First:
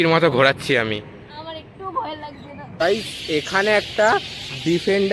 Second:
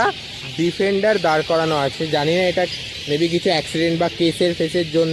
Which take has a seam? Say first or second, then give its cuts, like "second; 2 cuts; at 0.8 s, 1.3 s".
first; 1 cut; at 2.8 s